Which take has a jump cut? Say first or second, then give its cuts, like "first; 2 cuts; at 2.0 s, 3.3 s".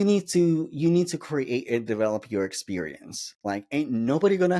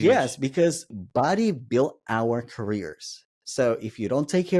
second; 1 cut; at 0.9 s